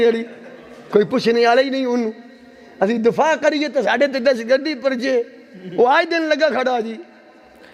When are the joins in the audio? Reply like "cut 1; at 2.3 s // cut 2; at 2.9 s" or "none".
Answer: none